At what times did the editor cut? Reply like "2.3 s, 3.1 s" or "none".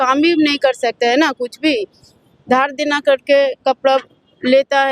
none